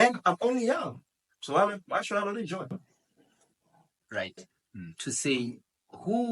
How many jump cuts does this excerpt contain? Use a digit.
1